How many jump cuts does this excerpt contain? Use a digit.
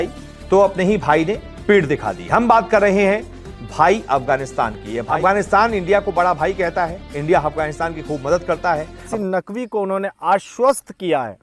2